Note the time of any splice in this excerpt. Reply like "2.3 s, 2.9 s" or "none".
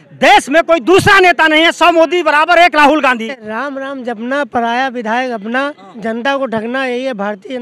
3.5 s, 5.9 s